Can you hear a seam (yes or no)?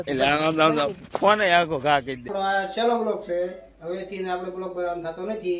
yes